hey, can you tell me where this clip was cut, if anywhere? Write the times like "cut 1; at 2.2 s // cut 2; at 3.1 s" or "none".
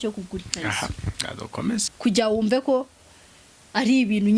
cut 1; at 1.9 s